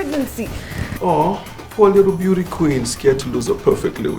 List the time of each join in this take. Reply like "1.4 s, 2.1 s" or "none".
0.9 s